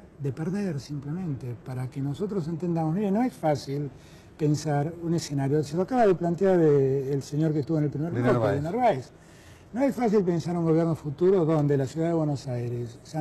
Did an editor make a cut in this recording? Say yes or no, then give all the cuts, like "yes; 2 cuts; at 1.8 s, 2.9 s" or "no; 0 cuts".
no; 0 cuts